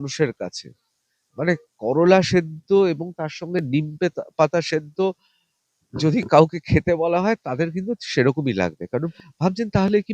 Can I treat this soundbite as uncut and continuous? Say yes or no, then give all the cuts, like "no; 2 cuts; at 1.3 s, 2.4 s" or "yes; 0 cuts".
no; 1 cut; at 9.1 s